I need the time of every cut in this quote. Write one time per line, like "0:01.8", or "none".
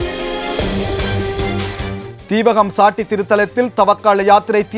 0:02.1